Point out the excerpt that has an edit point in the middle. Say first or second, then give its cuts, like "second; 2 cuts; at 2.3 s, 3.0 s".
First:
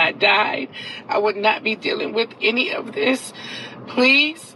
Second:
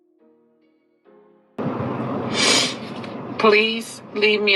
second; 1 cut; at 0.9 s